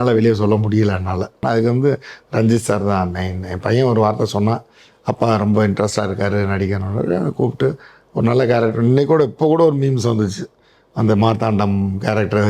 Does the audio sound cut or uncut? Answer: cut